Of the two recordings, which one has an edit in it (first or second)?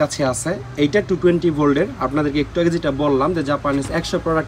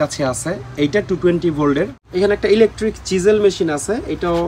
second